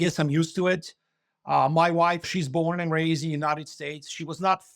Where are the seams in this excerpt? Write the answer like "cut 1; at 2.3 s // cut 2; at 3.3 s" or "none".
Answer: cut 1; at 2.3 s